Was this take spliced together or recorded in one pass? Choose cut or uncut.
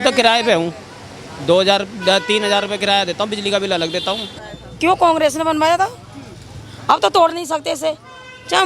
cut